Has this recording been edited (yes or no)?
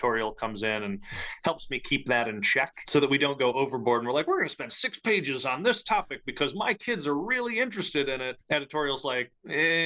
yes